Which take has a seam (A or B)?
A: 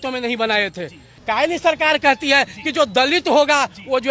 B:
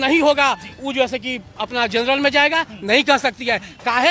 A